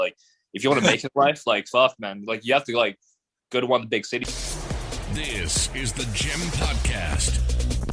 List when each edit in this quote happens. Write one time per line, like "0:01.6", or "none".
0:04.2